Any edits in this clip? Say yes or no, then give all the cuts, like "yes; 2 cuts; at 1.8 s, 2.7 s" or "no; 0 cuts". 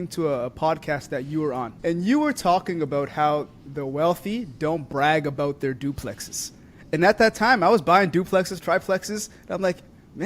yes; 1 cut; at 1.7 s